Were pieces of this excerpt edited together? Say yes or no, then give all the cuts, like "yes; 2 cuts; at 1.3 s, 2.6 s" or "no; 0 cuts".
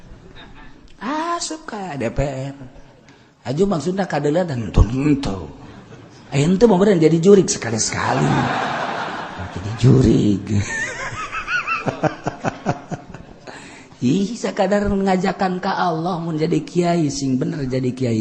no; 0 cuts